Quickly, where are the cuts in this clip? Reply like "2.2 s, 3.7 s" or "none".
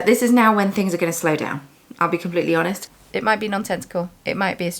2.9 s